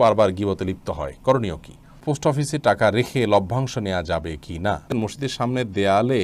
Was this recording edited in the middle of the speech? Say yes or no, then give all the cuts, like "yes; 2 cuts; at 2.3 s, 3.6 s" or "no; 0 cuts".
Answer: yes; 2 cuts; at 2.0 s, 4.9 s